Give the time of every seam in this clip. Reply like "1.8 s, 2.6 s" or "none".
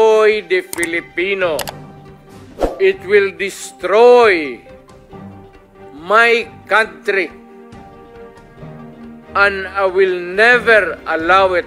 7.3 s, 9.3 s